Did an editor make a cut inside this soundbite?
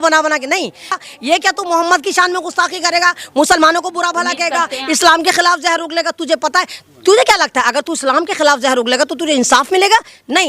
yes; 1 cut; at 1.0 s

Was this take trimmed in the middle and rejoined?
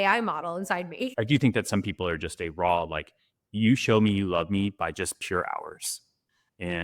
yes; 1 cut; at 1.1 s

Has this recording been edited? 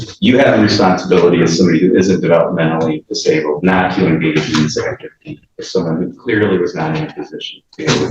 no; 0 cuts

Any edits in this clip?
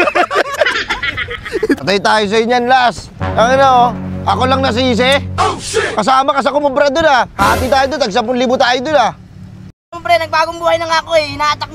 no; 0 cuts

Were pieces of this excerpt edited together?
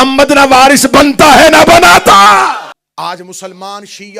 yes; 1 cut; at 2.8 s

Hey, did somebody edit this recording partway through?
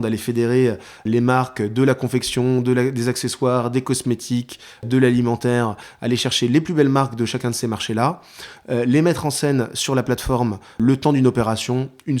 yes; 3 cuts; at 1.0 s, 4.9 s, 10.8 s

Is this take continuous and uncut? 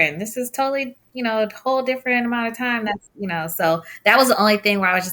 yes; 0 cuts

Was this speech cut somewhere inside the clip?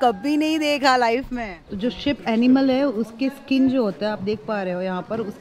yes; 1 cut; at 1.6 s

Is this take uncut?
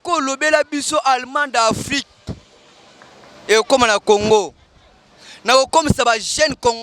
yes; 0 cuts

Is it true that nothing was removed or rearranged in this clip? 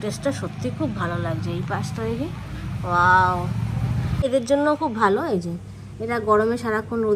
no; 1 cut; at 4.2 s

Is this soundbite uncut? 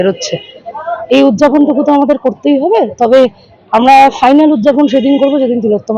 yes; 0 cuts

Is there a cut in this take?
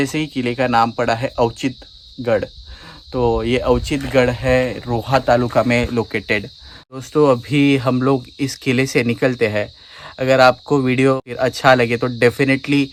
no; 0 cuts

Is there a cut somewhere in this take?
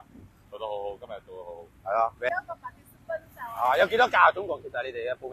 yes; 1 cut; at 2.3 s

